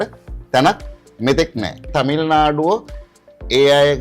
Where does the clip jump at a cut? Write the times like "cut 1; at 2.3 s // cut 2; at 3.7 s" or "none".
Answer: cut 1; at 1.8 s